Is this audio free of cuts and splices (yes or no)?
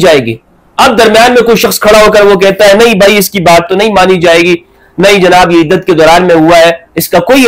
yes